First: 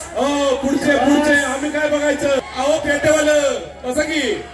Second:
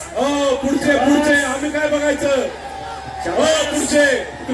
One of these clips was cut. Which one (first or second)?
first